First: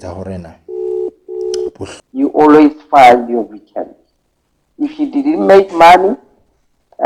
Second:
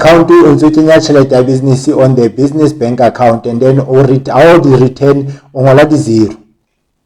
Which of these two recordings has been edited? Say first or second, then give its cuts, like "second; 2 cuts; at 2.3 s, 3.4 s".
first; 1 cut; at 1.9 s